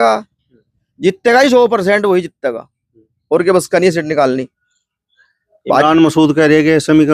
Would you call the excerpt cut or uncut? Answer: uncut